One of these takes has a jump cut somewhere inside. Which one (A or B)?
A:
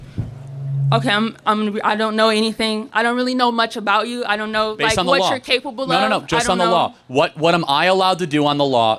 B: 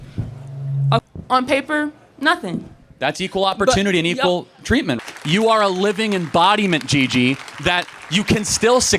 B